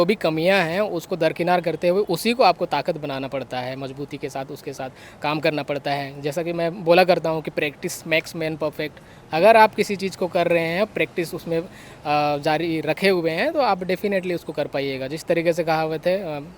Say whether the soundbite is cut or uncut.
uncut